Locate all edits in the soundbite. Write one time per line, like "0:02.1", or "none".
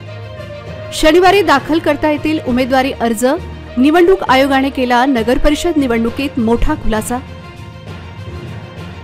0:01.0